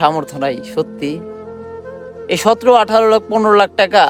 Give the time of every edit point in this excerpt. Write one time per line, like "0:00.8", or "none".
none